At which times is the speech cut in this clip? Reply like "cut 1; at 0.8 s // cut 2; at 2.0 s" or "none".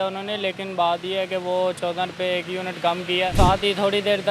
cut 1; at 3.3 s